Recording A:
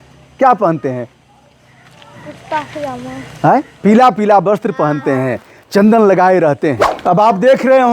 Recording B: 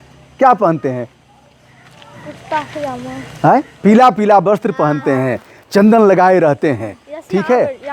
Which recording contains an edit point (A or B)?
A